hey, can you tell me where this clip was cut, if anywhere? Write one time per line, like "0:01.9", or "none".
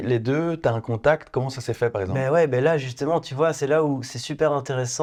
none